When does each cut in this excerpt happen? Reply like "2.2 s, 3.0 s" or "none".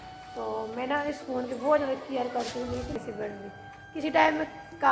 3.0 s